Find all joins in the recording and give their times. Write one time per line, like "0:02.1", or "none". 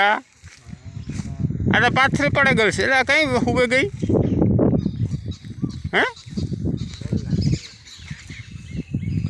none